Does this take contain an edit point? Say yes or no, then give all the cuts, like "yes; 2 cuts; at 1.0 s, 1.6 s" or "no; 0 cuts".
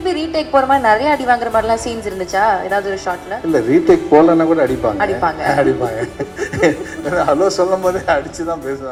no; 0 cuts